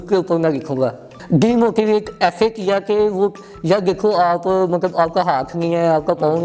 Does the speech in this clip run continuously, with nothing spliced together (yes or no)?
no